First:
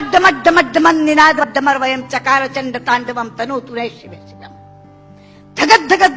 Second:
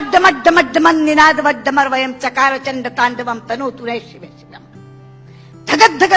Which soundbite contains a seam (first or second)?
first